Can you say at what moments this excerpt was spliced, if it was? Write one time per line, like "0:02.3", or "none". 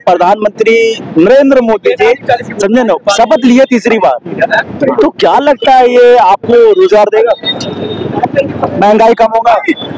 none